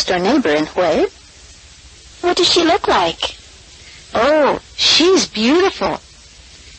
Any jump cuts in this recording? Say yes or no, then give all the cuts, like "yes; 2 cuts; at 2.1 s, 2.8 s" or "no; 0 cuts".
no; 0 cuts